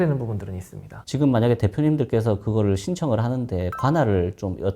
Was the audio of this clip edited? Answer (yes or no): yes